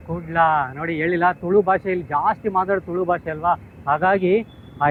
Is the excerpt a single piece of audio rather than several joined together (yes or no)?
yes